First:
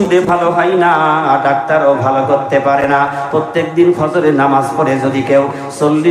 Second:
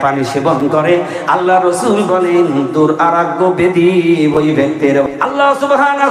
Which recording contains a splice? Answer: second; 1 cut; at 5.1 s

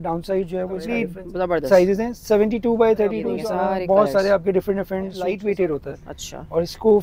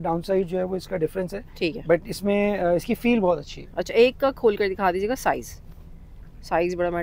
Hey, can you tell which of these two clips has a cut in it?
first; 3 cuts; at 1.2 s, 3.3 s, 5.4 s

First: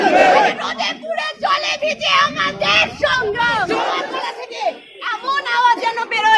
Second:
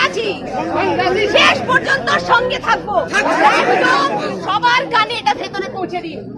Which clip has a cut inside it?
first; 1 cut; at 4.0 s

